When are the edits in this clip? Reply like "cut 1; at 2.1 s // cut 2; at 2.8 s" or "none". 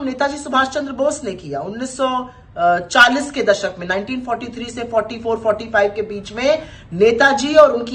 none